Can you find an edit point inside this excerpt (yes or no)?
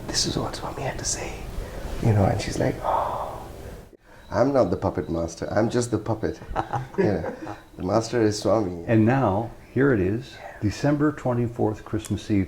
yes